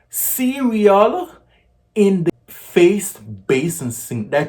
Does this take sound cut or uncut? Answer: cut